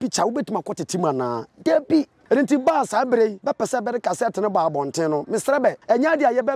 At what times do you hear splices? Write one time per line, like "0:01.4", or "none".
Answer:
0:02.2
0:03.4
0:05.8